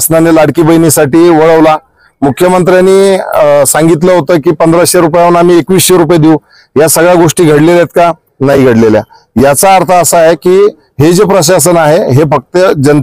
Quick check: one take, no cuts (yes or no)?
yes